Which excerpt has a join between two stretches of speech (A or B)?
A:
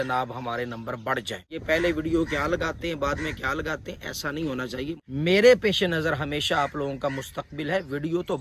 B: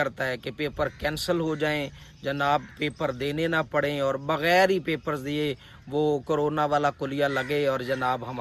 A